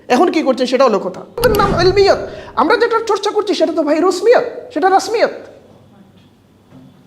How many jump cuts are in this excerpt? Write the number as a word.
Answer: one